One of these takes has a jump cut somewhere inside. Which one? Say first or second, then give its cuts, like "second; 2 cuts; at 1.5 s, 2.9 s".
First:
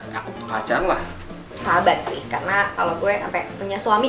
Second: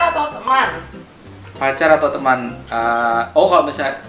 first; 1 cut; at 1.5 s